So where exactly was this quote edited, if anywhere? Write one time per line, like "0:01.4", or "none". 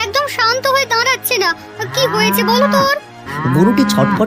0:03.3